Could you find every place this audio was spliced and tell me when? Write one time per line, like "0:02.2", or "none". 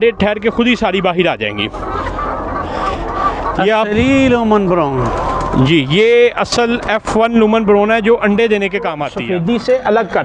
0:09.1